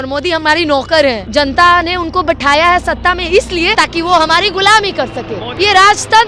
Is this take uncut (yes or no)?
no